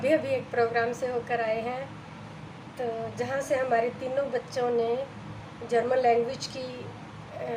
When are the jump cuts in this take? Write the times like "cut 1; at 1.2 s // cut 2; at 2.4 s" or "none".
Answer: none